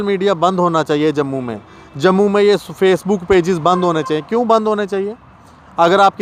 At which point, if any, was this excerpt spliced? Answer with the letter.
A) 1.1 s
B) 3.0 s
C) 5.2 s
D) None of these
D